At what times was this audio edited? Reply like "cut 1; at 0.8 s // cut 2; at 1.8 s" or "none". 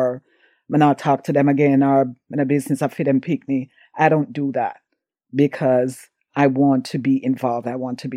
none

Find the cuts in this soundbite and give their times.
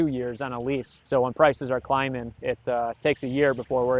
cut 1; at 0.9 s // cut 2; at 2.4 s

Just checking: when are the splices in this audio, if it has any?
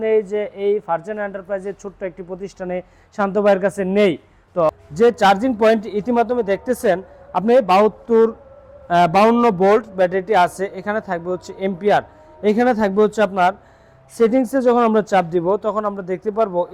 cut 1; at 4.7 s

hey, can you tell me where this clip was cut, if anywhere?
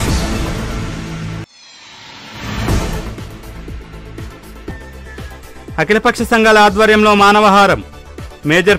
cut 1; at 1.6 s // cut 2; at 5.4 s

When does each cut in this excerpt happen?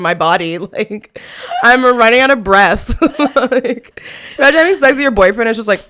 none

